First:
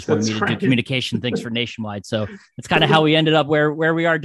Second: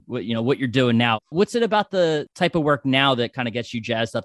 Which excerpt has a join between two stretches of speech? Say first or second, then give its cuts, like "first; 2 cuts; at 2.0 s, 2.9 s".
second; 2 cuts; at 1.2 s, 2.3 s